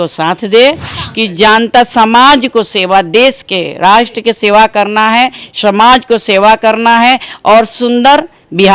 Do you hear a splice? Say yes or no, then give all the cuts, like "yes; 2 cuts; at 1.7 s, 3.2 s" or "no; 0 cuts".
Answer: yes; 1 cut; at 0.9 s